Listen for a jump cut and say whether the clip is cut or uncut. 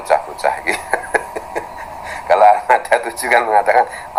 uncut